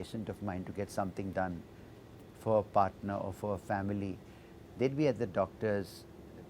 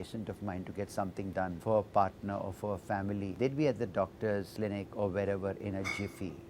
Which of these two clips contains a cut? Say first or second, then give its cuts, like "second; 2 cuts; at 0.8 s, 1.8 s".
second; 3 cuts; at 1.6 s, 3.3 s, 4.5 s